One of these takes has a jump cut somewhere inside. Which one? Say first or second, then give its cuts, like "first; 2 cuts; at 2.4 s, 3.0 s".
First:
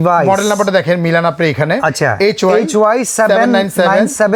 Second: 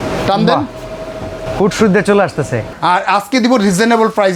second; 2 cuts; at 1.5 s, 2.6 s